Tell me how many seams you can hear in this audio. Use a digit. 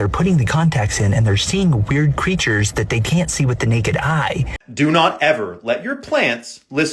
1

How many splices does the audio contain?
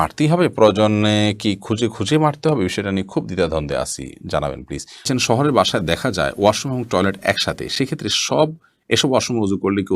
1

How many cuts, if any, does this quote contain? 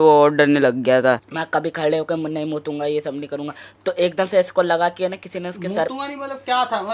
1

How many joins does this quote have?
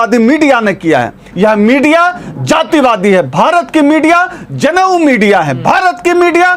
1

